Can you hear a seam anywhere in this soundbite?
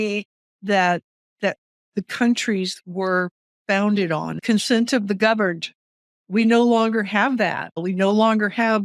yes; 2 cuts; at 4.4 s, 7.8 s

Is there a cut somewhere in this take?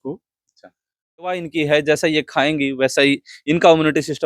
yes; 1 cut; at 1.3 s

